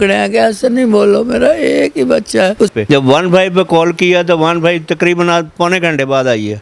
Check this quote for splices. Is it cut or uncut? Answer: cut